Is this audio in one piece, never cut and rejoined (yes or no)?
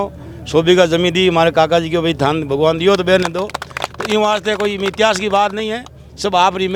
yes